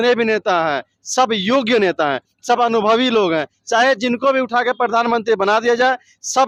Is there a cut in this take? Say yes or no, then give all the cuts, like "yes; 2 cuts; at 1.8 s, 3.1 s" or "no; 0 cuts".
no; 0 cuts